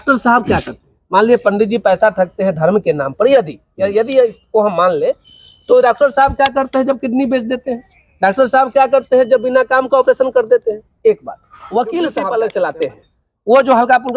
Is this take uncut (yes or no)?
no